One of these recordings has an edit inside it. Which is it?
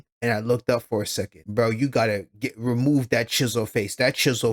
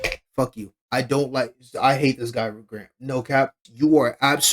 second; 1 cut; at 3.6 s

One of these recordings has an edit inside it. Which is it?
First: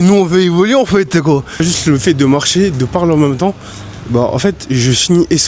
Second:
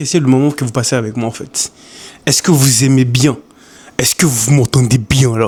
first; 1 cut; at 1.6 s

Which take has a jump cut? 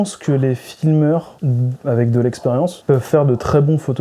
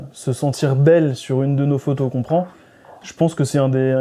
first; 2 cuts; at 1.4 s, 2.8 s

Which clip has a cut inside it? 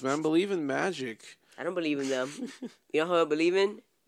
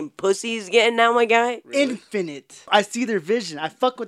second; 1 cut; at 2.6 s

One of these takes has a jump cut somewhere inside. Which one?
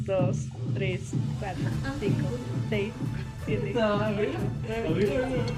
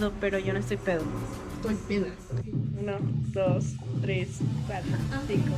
second; 1 cut; at 2.3 s

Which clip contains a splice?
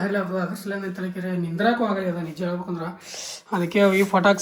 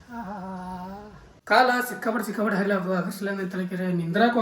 second; 1 cut; at 1.3 s

